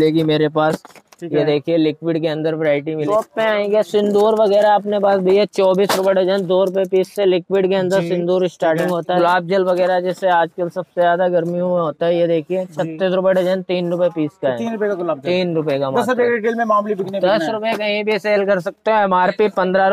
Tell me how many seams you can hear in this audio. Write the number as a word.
two